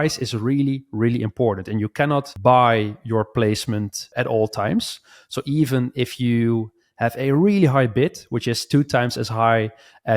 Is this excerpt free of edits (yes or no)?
no